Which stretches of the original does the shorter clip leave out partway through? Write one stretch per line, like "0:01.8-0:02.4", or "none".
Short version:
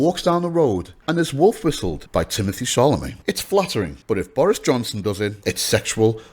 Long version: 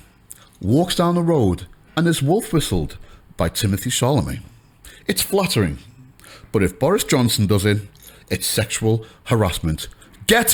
0:01.7-0:01.8
0:02.8-0:03.2
0:04.4-0:04.9
0:05.8-0:06.4
0:07.8-0:08.2